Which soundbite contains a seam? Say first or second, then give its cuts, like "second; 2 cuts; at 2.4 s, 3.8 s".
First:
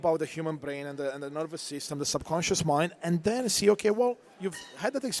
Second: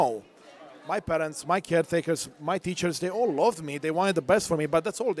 first; 1 cut; at 4.3 s